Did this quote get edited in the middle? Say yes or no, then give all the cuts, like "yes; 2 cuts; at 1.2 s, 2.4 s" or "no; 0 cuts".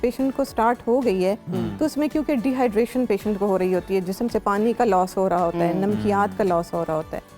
no; 0 cuts